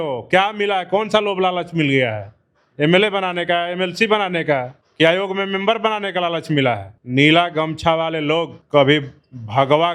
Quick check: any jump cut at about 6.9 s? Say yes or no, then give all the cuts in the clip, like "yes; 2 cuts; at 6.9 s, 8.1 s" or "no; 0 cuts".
yes; 3 cuts; at 4.8 s, 6.9 s, 8.6 s